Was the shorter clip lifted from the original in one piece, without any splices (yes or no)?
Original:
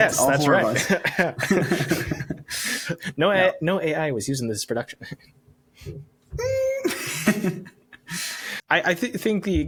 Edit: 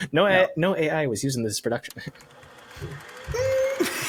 yes